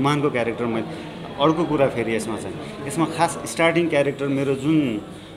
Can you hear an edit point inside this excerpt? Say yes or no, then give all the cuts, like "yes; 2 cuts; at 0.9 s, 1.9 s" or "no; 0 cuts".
no; 0 cuts